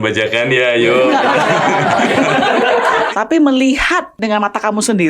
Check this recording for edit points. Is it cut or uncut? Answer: cut